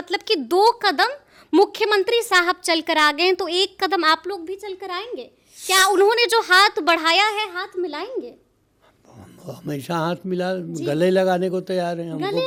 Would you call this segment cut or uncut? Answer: uncut